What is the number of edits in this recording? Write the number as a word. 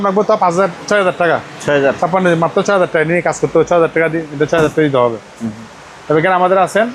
zero